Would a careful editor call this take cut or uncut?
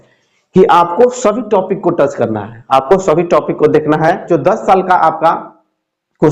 cut